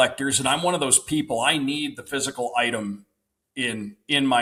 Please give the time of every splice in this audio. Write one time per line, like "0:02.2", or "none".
none